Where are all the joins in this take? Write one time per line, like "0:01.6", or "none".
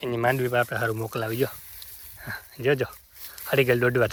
none